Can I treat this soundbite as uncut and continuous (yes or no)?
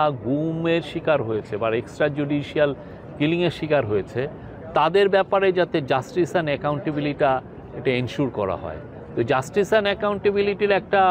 yes